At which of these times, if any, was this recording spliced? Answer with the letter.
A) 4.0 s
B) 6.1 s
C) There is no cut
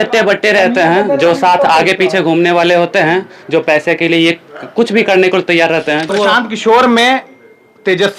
B